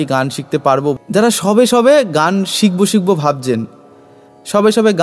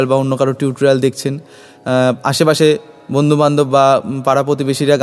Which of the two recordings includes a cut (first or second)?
first